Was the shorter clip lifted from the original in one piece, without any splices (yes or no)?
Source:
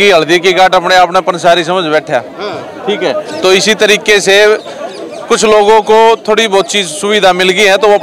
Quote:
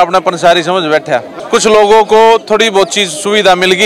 no